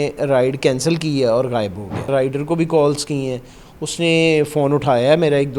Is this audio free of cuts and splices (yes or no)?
no